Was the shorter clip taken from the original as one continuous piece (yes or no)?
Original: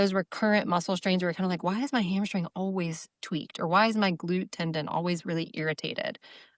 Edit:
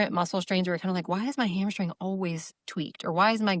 yes